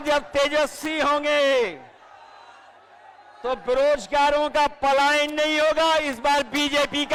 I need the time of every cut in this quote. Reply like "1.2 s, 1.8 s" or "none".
none